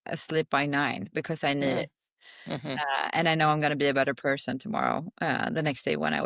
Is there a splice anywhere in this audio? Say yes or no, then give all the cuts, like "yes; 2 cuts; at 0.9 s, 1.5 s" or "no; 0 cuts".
no; 0 cuts